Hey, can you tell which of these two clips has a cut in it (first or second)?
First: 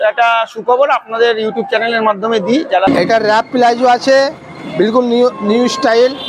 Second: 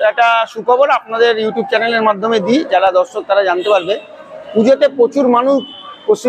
first